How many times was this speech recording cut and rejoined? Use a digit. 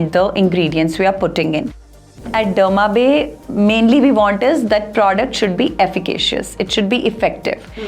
2